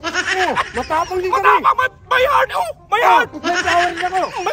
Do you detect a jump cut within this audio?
no; 0 cuts

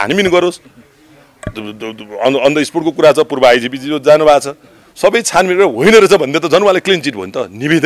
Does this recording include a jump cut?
no; 0 cuts

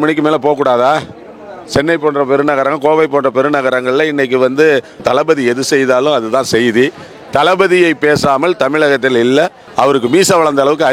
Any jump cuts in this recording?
yes; 2 cuts; at 5.0 s, 9.6 s

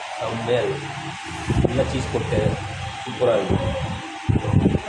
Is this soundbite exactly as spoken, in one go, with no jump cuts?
yes; 0 cuts

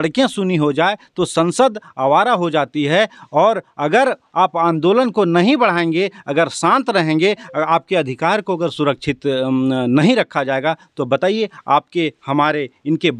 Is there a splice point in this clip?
no; 0 cuts

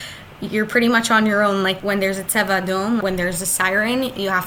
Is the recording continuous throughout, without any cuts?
no; 2 cuts; at 1.8 s, 3.0 s

